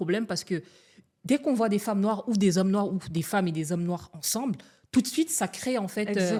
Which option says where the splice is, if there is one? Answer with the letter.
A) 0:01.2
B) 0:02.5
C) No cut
C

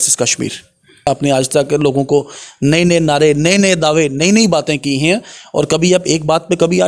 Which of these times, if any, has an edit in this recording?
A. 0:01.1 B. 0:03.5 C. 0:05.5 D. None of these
A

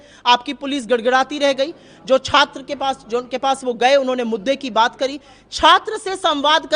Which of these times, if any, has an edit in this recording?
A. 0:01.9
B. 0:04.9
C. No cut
C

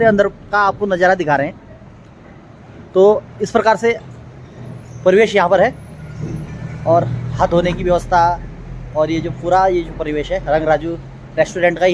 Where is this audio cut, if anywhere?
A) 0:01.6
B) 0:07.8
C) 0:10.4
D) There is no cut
D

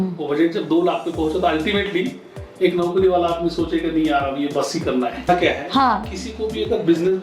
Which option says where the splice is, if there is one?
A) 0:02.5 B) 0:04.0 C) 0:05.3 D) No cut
C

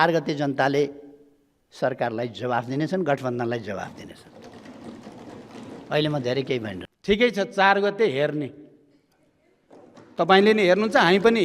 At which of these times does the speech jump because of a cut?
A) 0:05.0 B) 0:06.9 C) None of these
B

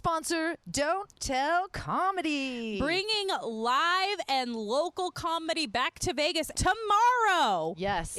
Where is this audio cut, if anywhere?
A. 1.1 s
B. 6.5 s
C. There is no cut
B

